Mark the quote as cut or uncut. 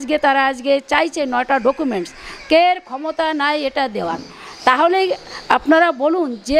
uncut